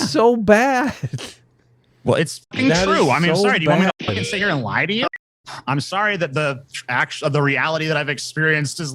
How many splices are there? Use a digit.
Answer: 1